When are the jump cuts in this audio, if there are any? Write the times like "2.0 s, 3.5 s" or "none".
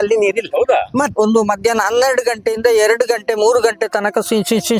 1.1 s